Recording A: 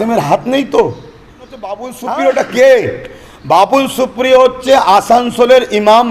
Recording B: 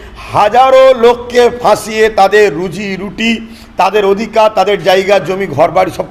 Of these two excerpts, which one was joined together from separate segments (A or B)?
A